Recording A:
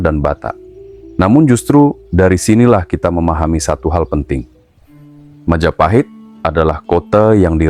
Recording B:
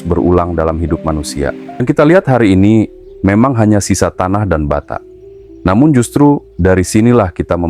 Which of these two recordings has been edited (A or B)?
B